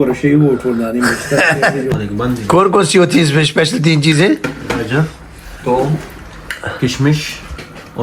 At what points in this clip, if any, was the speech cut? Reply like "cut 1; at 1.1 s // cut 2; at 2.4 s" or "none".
cut 1; at 1.9 s